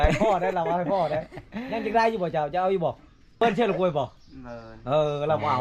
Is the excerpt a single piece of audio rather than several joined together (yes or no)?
no